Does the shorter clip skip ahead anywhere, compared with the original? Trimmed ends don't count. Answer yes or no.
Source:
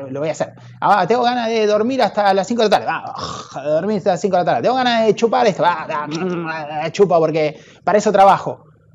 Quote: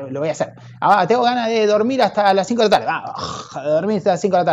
no